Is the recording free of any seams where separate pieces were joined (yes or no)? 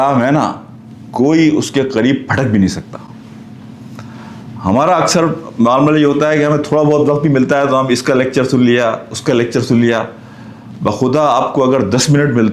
yes